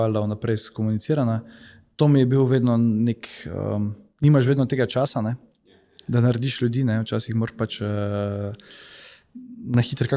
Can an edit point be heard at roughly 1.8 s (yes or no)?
no